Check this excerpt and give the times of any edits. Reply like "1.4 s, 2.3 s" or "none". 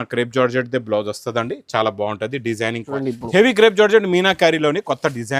2.9 s